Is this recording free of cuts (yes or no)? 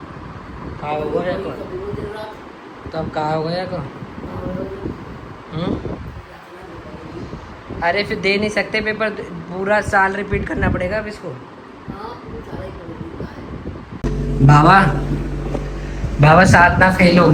no